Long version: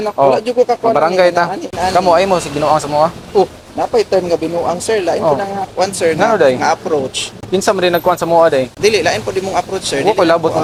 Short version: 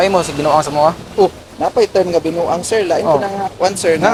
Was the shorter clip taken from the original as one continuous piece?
yes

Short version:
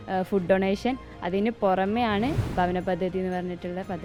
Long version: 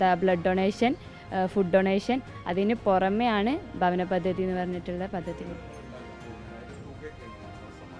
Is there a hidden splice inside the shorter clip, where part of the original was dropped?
no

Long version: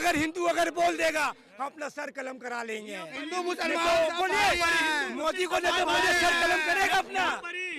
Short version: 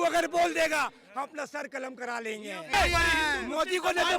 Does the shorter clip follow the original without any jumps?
no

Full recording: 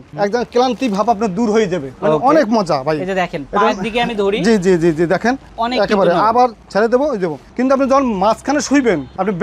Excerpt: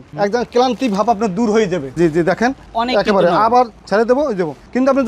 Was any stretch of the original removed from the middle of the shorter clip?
yes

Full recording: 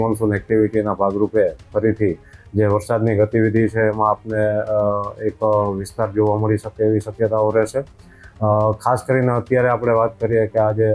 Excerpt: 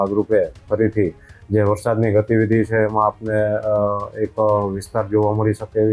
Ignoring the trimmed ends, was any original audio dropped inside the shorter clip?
no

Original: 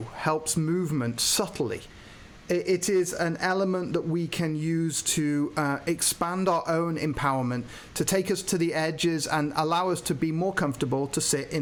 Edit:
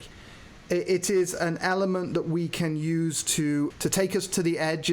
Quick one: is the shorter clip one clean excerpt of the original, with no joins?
no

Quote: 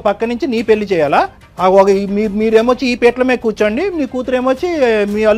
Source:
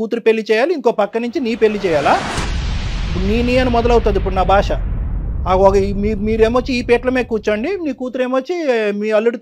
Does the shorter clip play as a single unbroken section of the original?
no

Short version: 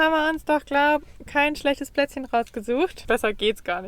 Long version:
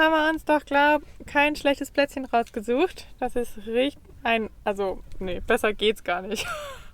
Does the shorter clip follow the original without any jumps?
no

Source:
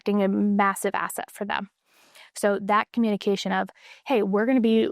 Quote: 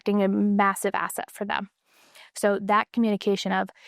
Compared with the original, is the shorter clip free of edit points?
yes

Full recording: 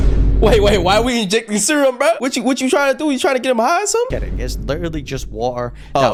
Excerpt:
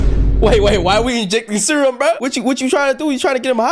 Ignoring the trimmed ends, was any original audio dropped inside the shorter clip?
no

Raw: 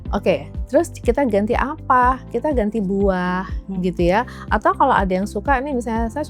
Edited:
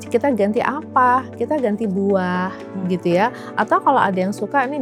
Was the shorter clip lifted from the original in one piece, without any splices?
yes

